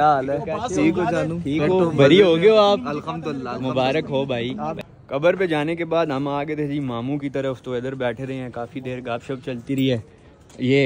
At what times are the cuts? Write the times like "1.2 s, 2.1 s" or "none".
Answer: 4.8 s